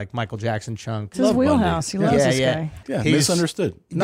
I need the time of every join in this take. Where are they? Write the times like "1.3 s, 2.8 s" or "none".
1.1 s, 2.8 s

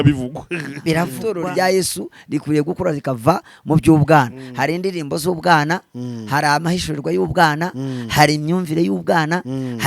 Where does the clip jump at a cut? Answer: 1.2 s

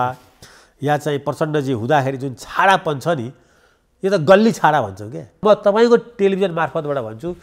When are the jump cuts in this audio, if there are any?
5.4 s

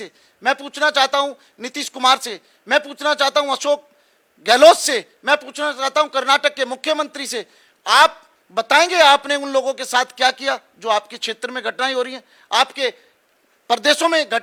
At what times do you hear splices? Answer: none

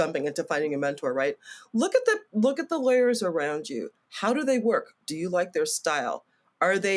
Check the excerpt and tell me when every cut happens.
none

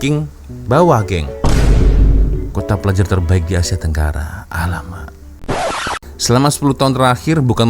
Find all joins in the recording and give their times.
5.8 s

